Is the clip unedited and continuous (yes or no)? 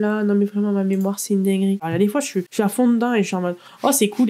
no